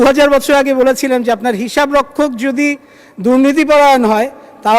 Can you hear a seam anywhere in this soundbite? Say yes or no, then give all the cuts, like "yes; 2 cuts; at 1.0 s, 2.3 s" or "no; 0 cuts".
no; 0 cuts